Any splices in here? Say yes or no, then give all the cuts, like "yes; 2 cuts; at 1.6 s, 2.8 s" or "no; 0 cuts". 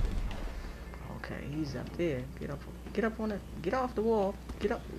yes; 1 cut; at 1.0 s